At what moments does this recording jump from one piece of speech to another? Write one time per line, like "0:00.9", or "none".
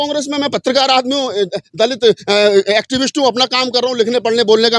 none